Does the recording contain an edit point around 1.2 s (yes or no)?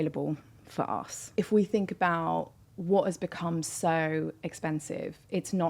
yes